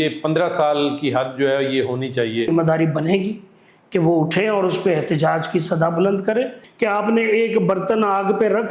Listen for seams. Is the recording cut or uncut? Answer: cut